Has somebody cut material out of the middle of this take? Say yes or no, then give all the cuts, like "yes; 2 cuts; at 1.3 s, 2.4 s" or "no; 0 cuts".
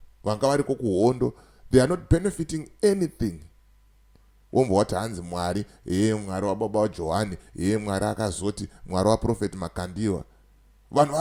no; 0 cuts